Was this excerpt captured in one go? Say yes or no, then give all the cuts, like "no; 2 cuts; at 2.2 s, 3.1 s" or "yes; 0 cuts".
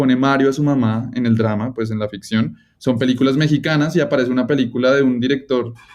yes; 0 cuts